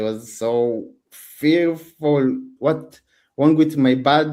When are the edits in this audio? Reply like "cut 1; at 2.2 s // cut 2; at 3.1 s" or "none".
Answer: cut 1; at 2.5 s

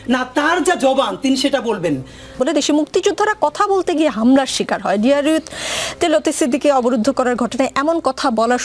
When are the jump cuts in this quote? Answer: cut 1; at 2.3 s

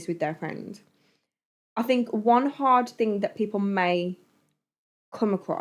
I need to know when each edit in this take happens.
none

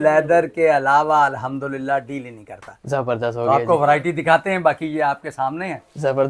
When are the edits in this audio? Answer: none

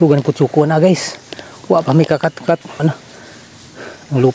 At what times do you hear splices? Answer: cut 1; at 2.8 s

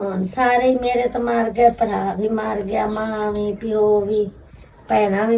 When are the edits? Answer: none

